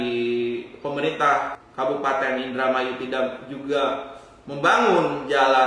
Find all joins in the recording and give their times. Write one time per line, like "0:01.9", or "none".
0:01.6